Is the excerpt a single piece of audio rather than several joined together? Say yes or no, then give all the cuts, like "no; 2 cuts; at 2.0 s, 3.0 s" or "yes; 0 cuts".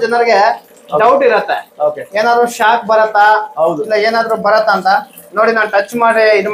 yes; 0 cuts